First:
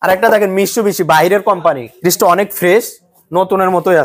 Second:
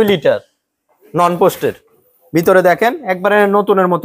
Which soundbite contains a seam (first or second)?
first